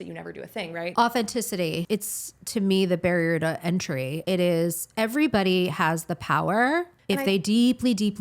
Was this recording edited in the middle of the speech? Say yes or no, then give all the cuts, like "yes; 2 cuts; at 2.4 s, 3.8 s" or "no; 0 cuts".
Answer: yes; 4 cuts; at 0.9 s, 1.8 s, 4.1 s, 7.0 s